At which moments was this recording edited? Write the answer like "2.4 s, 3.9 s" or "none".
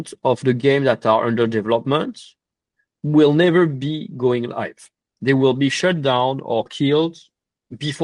none